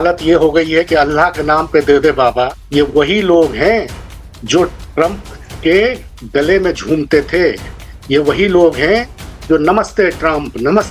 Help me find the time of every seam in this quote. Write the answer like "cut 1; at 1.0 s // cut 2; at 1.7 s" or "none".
cut 1; at 2.6 s